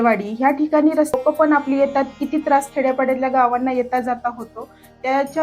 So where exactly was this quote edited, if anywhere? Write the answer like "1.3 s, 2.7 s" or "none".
1.1 s